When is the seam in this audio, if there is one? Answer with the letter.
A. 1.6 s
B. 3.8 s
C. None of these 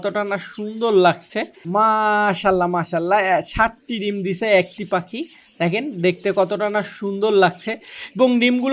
A